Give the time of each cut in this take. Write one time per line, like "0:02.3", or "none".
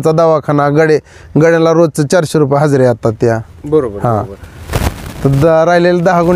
0:04.6

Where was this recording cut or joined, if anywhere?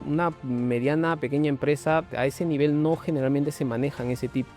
0:02.1

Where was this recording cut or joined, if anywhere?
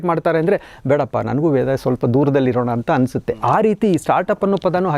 none

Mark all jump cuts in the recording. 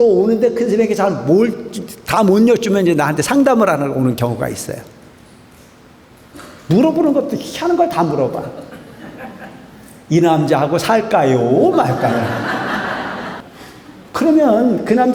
0:13.4

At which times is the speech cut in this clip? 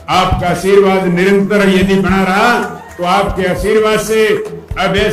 none

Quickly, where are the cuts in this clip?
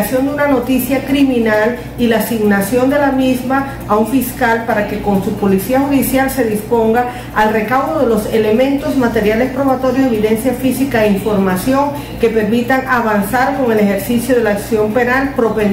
none

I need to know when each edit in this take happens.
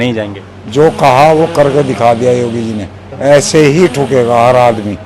0:03.0

